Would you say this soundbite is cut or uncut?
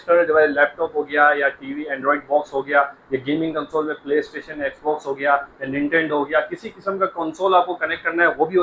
uncut